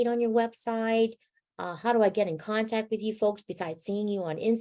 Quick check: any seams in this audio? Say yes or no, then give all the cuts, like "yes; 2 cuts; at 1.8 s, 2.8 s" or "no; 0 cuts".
no; 0 cuts